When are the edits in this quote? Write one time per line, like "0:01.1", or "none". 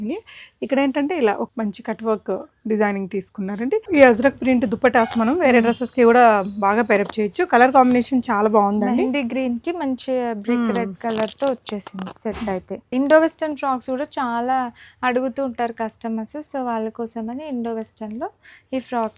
0:01.5
0:03.8
0:12.9